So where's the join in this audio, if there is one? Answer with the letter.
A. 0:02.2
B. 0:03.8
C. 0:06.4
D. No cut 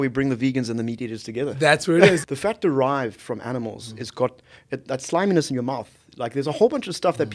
A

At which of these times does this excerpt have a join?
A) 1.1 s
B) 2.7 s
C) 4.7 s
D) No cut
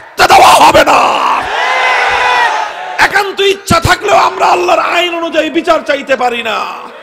B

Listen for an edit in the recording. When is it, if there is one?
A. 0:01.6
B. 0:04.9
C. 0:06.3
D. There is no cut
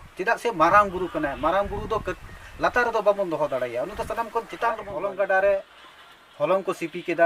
B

